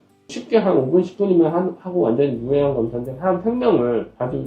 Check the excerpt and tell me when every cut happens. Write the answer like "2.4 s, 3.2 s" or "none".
none